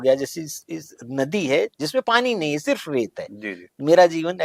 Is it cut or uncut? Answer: uncut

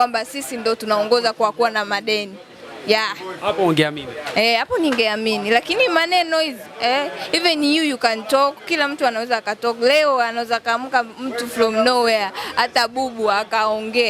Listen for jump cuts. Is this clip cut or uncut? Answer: uncut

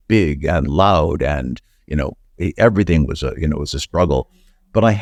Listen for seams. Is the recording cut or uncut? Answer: uncut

